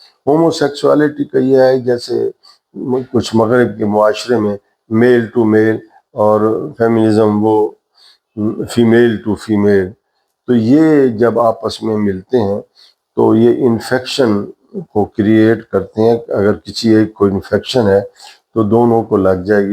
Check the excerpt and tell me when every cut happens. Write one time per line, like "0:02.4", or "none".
none